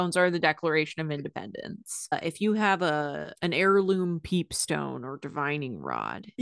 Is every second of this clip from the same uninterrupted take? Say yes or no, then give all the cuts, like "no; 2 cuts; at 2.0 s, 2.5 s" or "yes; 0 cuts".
no; 2 cuts; at 2.1 s, 3.3 s